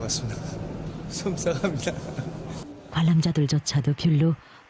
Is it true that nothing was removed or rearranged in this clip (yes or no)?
no